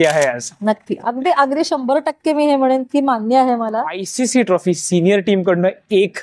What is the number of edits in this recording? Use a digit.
1